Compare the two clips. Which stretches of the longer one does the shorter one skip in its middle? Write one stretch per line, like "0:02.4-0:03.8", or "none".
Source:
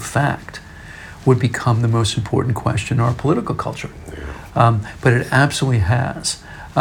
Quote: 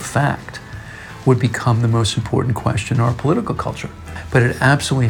0:04.2-0:04.9